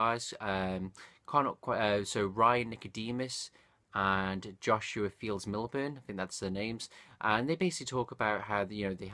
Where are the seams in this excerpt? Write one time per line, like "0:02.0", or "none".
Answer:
0:03.1

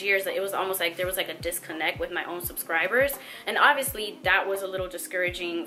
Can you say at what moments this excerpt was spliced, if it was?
none

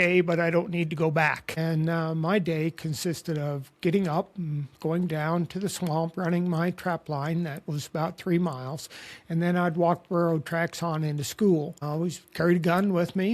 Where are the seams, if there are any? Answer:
0:01.5
0:11.8

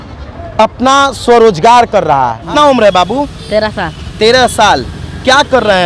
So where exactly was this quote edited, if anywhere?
0:02.4

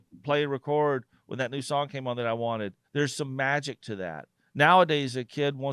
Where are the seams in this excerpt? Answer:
0:02.8

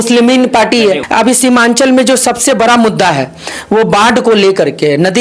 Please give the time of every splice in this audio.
0:01.0

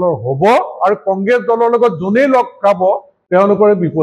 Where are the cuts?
0:03.1

